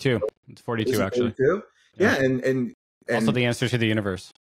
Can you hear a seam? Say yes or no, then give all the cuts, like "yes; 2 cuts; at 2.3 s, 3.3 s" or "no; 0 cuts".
no; 0 cuts